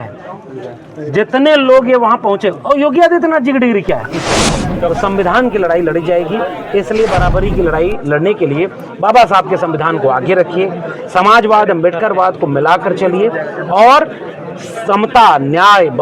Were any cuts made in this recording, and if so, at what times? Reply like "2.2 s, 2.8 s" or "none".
4.3 s